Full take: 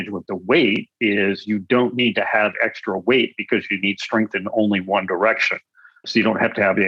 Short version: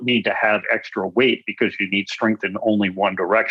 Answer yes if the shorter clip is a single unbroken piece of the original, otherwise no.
yes